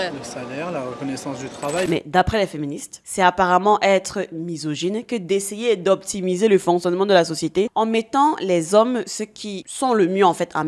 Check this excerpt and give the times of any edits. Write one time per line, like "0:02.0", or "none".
0:01.9